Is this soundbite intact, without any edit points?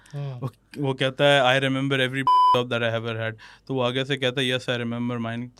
yes; 0 cuts

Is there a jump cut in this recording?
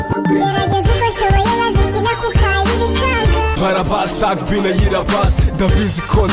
yes; 1 cut; at 3.5 s

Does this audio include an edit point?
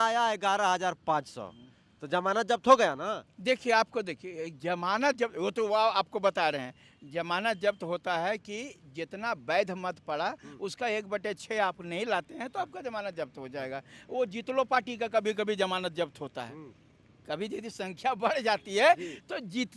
no; 0 cuts

